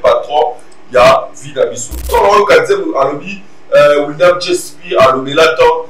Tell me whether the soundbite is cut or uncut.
cut